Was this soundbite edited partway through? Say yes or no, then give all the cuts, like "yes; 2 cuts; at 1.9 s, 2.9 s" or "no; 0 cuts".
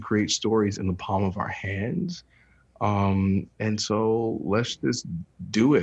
no; 0 cuts